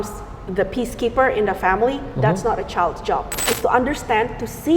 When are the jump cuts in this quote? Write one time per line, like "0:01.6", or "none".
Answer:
0:03.4